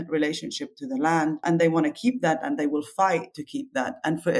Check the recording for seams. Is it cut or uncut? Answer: cut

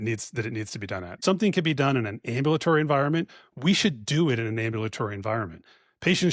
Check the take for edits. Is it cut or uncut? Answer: cut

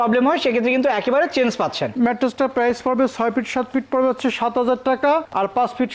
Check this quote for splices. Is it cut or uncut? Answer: cut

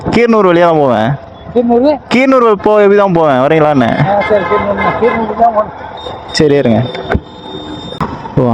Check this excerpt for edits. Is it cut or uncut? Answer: uncut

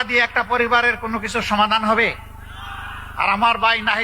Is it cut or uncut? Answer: uncut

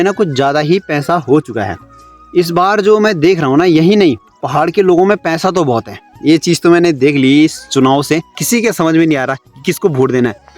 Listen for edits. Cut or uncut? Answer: cut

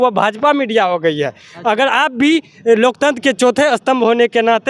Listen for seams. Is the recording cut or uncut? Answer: uncut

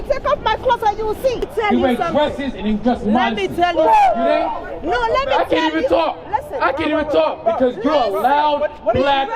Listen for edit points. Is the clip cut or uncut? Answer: cut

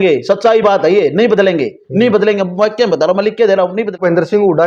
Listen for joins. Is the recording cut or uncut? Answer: uncut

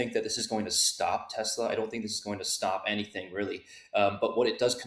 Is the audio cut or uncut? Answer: uncut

